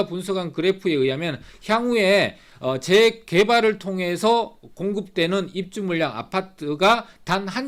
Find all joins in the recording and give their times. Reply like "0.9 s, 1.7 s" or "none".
none